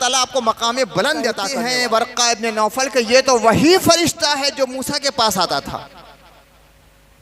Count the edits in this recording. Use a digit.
1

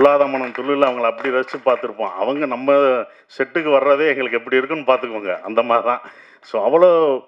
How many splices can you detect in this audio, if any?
0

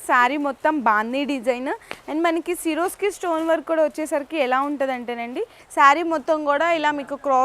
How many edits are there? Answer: 1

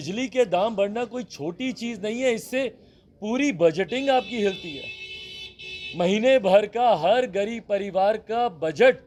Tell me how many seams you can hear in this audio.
0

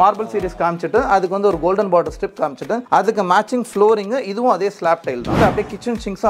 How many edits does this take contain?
1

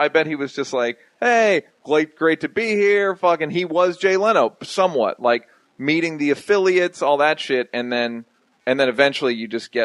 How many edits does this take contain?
0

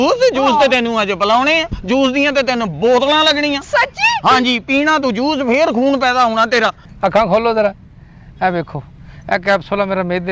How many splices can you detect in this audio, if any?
1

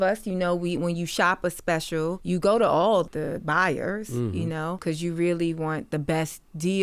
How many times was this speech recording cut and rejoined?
3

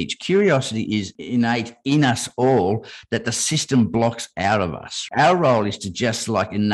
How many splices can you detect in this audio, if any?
2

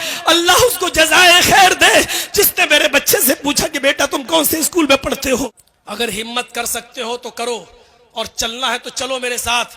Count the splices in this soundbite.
1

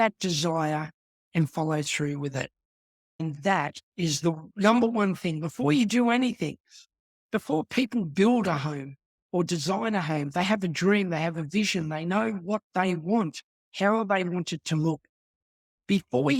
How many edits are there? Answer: 1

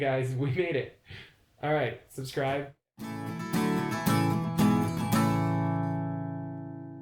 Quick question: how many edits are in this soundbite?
1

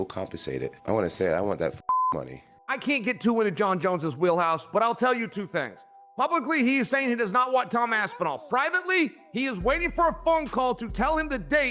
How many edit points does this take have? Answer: 1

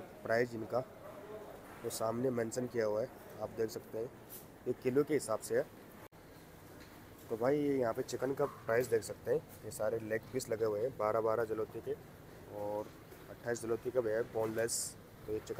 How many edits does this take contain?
0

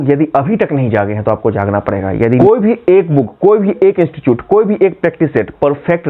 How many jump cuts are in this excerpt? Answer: 1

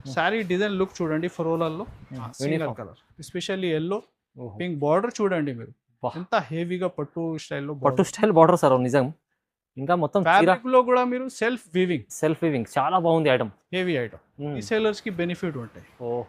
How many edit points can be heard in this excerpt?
2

